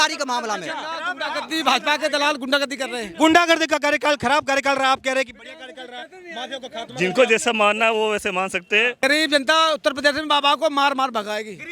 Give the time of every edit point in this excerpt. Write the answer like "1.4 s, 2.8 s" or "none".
9.0 s

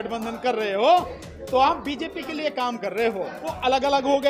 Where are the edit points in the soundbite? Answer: 3.4 s

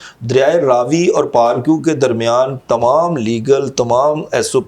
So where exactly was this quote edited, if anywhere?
none

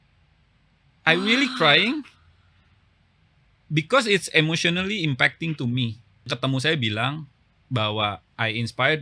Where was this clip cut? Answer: 6.3 s

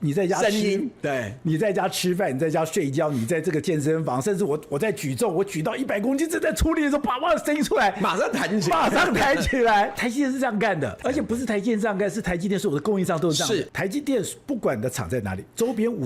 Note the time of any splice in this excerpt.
9.9 s, 11.0 s, 13.7 s

